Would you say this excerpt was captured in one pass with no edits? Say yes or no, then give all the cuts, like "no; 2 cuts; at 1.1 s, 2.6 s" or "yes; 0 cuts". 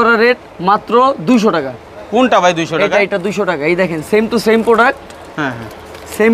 yes; 0 cuts